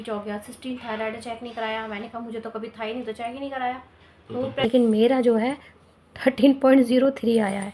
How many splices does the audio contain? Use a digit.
1